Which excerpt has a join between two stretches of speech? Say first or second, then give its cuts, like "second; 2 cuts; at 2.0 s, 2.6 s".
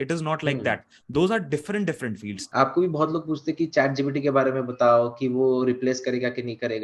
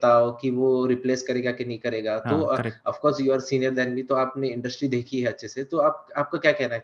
first; 1 cut; at 2.4 s